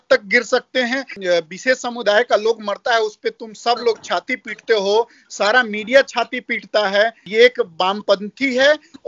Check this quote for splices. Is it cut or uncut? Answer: cut